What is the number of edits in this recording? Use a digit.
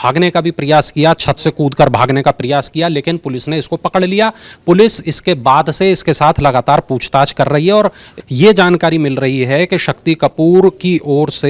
1